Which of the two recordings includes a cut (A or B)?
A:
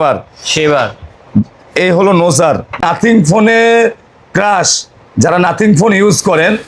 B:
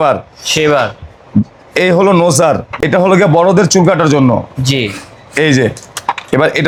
A